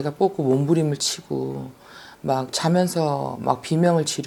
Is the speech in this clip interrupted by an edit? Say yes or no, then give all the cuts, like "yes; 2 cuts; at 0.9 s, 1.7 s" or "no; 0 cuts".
no; 0 cuts